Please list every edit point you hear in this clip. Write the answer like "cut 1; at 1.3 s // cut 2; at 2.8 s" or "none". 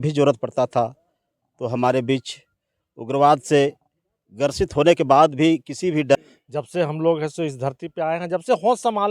cut 1; at 6.1 s